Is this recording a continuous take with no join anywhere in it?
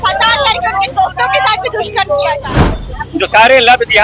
no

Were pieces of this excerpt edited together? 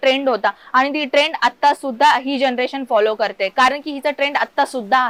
no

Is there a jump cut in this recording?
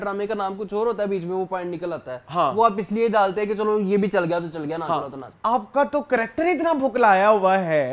yes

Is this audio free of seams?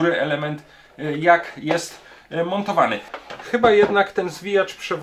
no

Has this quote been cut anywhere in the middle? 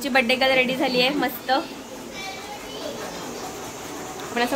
no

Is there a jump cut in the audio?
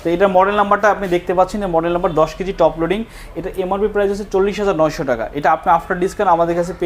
no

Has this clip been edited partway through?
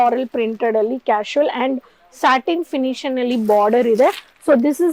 no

